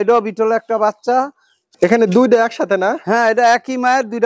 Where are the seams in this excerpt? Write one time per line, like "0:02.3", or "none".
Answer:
0:01.7